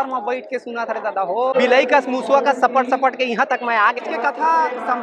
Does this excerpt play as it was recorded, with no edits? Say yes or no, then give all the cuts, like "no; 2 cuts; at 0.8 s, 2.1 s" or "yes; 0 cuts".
no; 2 cuts; at 1.5 s, 4.0 s